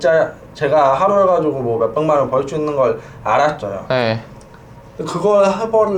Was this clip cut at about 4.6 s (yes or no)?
no